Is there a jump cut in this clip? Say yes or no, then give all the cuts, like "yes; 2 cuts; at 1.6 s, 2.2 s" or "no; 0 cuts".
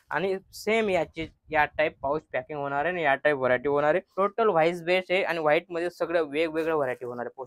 yes; 1 cut; at 4.1 s